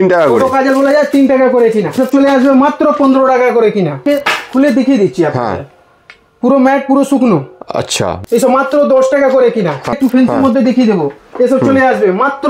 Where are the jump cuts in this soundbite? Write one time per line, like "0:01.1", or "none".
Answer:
0:02.0
0:04.0
0:08.2
0:10.0

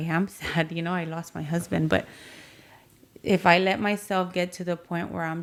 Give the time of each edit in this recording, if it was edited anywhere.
none

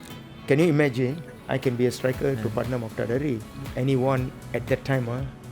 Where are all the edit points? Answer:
0:01.3
0:03.6
0:04.4

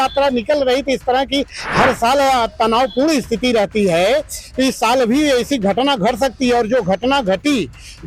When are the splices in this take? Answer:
none

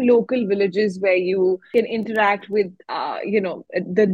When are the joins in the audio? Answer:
0:01.6
0:02.8

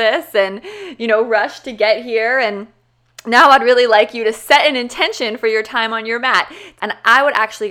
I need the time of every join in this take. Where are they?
0:06.6

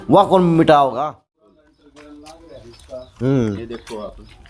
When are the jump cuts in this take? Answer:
0:01.0

